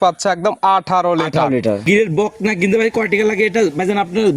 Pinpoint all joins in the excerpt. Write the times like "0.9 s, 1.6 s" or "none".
1.8 s